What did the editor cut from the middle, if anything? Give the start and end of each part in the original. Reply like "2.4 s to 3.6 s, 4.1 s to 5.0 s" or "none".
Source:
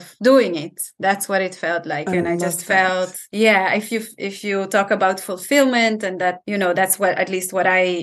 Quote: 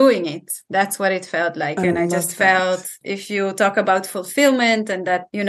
3.2 s to 4.1 s